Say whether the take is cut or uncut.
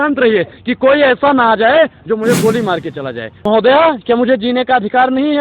cut